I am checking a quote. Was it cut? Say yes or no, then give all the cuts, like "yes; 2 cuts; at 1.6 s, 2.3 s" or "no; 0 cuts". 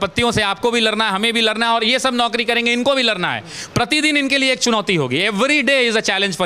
no; 0 cuts